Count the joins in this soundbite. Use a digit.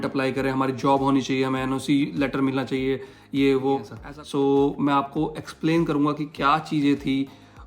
1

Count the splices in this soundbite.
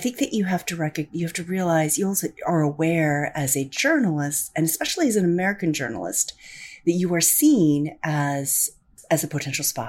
1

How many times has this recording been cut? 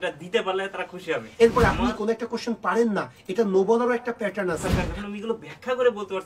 2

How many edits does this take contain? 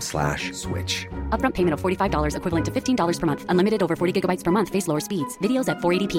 0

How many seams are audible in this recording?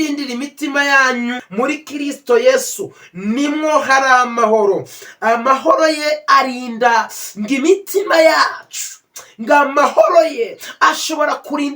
2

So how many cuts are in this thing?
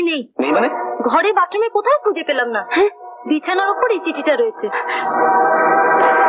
0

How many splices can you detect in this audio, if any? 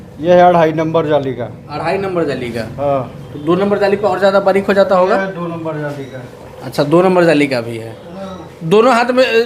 0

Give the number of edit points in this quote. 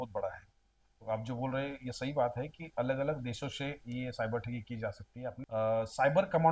1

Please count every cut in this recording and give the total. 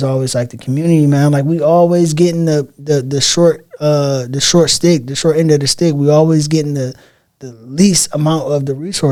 0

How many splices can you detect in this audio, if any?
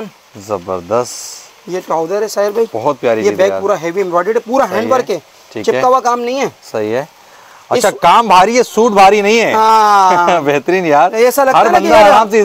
0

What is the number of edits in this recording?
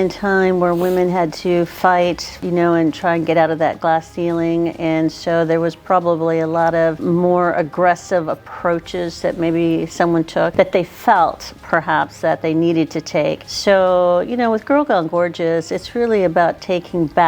4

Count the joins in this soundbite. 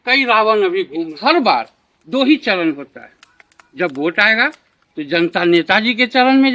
1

